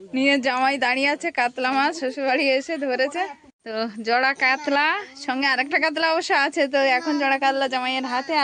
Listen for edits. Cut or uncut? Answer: uncut